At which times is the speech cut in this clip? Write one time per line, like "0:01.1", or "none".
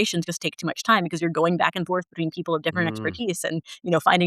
none